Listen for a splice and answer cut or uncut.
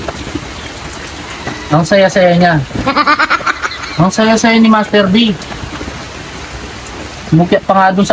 uncut